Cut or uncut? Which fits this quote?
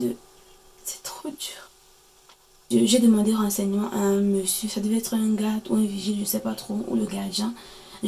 cut